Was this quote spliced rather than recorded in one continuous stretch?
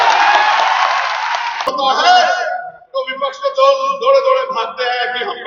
yes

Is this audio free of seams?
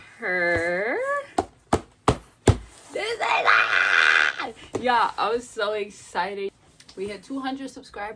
yes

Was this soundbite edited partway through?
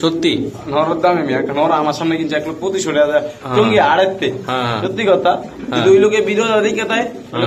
no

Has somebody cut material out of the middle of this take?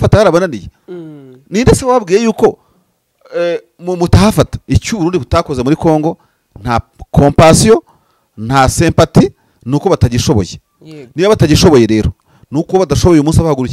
yes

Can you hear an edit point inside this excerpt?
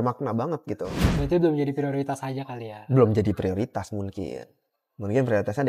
yes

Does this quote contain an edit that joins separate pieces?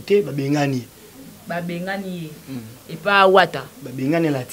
no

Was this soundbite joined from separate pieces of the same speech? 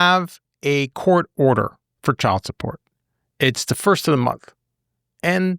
yes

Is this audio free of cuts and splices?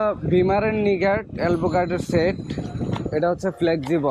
yes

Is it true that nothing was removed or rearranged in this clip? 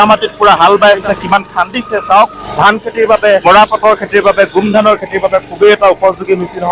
no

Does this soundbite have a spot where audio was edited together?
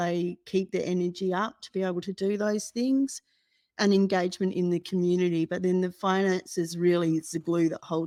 no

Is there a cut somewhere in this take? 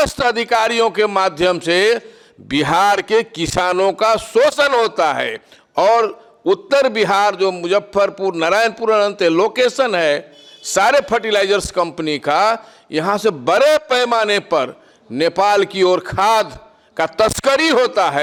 no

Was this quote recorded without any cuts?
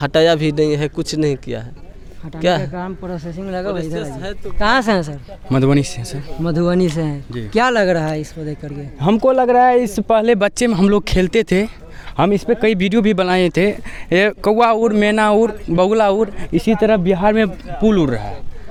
yes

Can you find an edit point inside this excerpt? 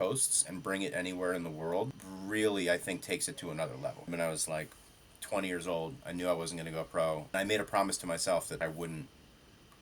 yes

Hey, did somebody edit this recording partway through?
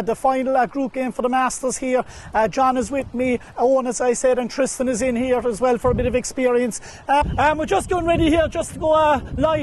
yes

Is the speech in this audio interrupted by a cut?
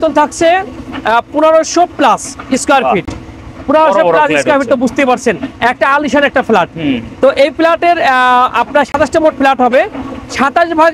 no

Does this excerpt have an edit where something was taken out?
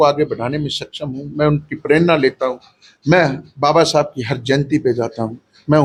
no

